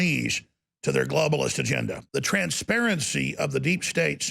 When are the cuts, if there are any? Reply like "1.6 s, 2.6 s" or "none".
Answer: 2.0 s

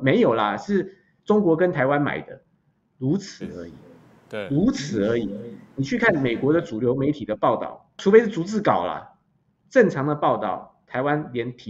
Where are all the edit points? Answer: 8.0 s

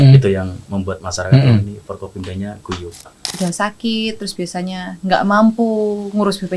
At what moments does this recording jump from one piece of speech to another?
3.2 s

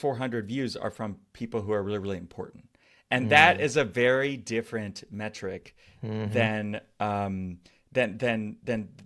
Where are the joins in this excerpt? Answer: none

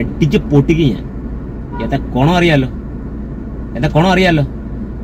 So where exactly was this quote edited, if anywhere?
none

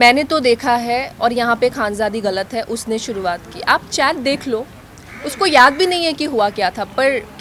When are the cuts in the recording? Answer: none

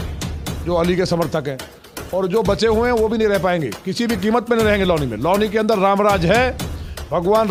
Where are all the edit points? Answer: none

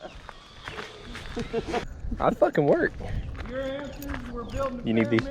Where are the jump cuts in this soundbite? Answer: 1.9 s

